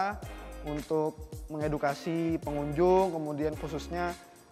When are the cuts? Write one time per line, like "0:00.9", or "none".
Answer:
none